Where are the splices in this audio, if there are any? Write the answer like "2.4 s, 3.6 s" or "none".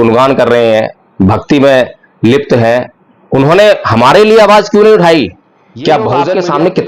5.8 s

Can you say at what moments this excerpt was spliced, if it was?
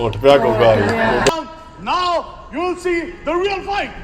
1.3 s

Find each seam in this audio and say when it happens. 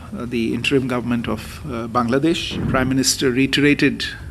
2.7 s

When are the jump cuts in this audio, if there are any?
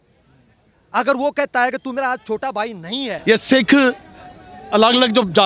3.1 s

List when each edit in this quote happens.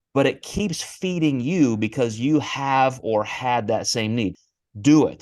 4.3 s

